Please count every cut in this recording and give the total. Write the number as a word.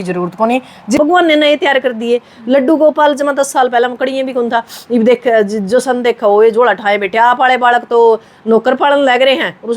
one